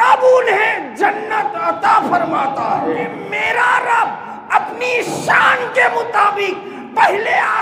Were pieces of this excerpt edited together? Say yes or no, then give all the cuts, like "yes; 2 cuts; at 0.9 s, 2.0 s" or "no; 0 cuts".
yes; 1 cut; at 3.3 s